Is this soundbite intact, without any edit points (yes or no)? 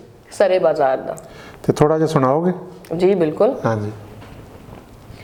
yes